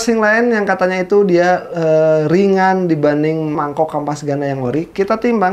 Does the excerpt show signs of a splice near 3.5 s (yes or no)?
yes